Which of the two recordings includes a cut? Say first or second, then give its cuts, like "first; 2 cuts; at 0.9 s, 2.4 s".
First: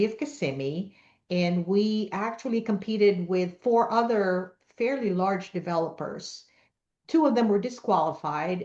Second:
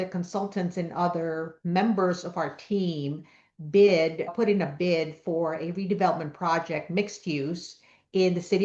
second; 1 cut; at 4.3 s